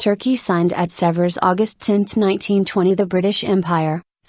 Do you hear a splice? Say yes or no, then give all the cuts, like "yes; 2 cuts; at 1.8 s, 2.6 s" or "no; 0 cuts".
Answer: yes; 1 cut; at 0.9 s